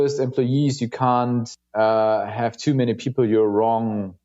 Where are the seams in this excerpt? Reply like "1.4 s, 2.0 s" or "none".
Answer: 1.6 s